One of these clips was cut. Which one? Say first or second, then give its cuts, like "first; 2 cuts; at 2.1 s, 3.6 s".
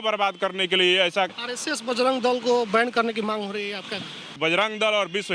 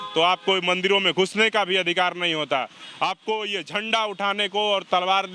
first; 2 cuts; at 1.5 s, 4.4 s